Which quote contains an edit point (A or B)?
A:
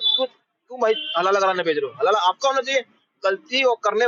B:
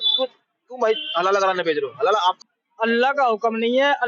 B